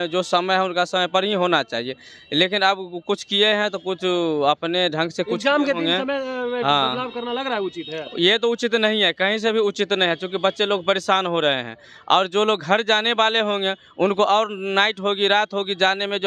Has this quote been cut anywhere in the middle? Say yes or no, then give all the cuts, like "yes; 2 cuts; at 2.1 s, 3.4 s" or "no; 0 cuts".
no; 0 cuts